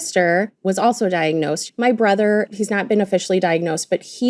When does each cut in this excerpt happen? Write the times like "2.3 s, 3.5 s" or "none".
1.6 s